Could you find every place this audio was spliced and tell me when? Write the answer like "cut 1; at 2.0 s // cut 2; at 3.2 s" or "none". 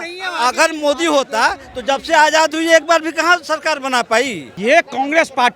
cut 1; at 4.4 s